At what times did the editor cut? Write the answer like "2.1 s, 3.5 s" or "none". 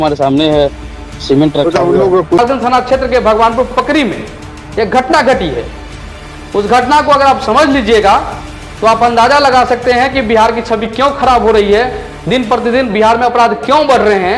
2.4 s

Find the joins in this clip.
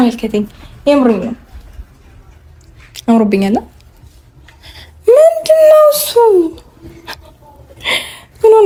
none

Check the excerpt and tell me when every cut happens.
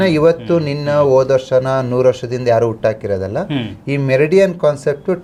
none

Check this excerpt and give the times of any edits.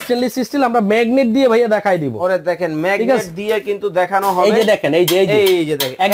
none

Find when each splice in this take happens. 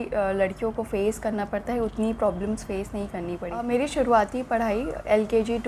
3.6 s

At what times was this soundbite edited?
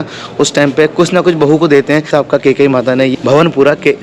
none

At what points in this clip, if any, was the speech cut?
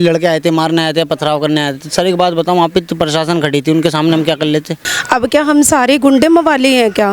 4.9 s

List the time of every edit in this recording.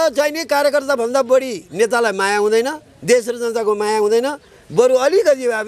none

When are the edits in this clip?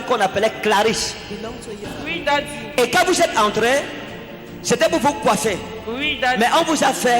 1.9 s

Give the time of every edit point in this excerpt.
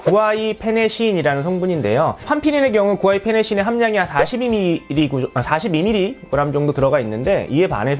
2.2 s

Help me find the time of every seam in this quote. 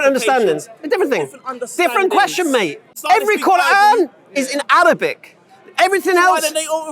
2.9 s

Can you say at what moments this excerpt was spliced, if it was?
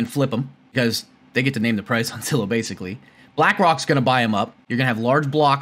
0.7 s, 4.6 s

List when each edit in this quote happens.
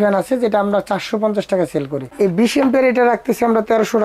2.1 s

